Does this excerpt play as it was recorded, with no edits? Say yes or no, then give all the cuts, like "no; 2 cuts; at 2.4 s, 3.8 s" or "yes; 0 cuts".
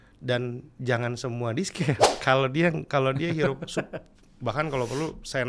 no; 1 cut; at 2.1 s